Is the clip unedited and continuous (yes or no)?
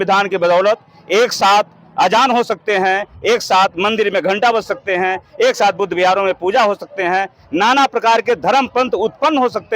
yes